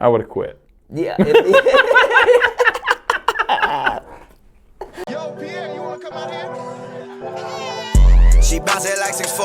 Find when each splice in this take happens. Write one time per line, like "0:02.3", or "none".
0:05.0